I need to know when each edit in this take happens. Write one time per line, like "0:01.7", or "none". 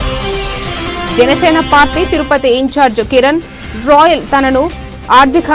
0:00.9